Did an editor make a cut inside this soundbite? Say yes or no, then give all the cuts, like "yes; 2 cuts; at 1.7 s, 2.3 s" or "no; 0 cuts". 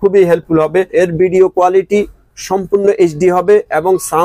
yes; 1 cut; at 0.9 s